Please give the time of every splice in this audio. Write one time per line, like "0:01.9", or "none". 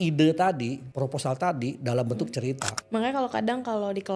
0:00.8
0:02.7